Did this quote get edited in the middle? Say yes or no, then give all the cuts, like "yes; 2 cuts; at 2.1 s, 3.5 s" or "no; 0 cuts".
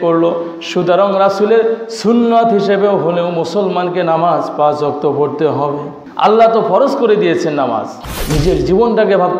yes; 2 cuts; at 6.0 s, 8.0 s